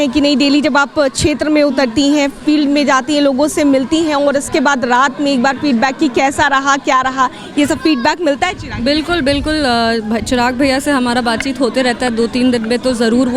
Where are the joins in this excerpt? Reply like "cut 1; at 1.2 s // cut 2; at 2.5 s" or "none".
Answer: none